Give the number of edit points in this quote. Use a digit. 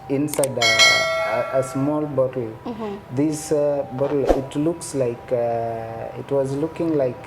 0